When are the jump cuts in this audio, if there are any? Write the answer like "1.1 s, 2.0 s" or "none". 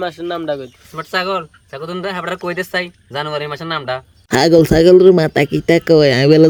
none